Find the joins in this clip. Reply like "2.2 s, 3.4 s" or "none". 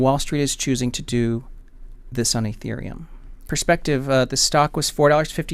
3.5 s